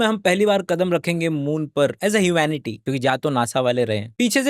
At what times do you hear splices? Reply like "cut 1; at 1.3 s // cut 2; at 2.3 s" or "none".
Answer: none